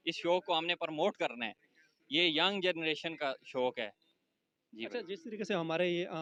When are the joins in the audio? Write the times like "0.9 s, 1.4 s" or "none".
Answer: none